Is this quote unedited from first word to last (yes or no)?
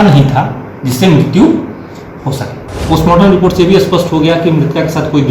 no